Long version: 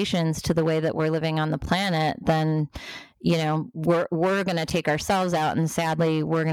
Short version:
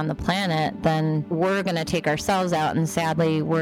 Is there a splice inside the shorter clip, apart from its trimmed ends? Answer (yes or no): yes